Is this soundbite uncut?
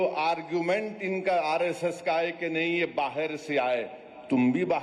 yes; 0 cuts

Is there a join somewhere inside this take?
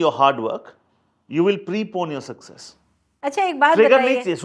yes; 1 cut; at 3.2 s

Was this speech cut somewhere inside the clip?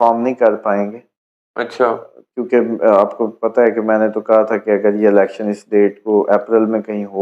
no; 0 cuts

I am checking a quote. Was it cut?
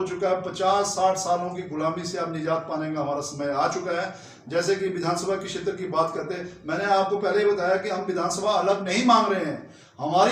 no; 0 cuts

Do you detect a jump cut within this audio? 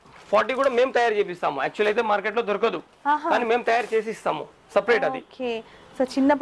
no; 0 cuts

